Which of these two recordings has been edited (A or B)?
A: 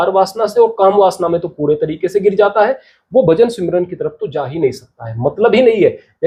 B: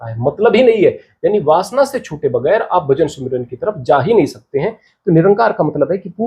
B